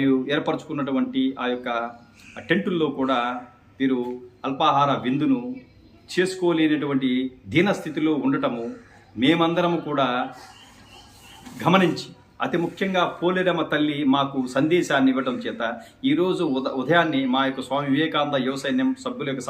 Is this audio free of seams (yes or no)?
yes